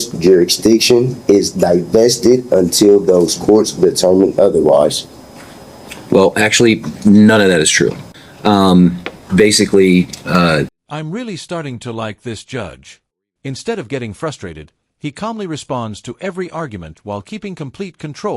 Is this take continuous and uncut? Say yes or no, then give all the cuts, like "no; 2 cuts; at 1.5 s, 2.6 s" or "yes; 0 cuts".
yes; 0 cuts